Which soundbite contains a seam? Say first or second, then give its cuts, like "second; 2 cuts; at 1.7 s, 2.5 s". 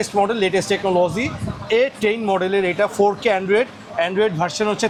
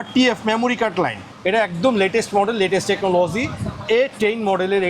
second; 1 cut; at 1.2 s